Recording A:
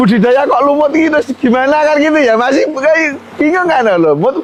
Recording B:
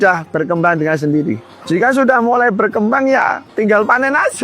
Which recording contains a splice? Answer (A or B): B